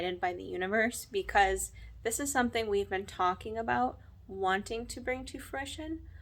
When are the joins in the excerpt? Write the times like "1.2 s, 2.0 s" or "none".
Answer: none